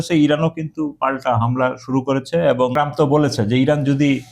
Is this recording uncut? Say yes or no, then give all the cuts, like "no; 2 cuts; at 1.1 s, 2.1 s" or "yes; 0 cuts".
no; 1 cut; at 2.7 s